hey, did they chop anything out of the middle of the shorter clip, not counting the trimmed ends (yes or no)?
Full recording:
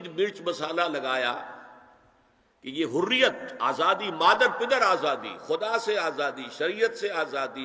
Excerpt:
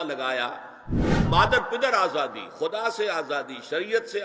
yes